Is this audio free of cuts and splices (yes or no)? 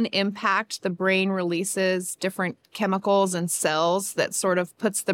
yes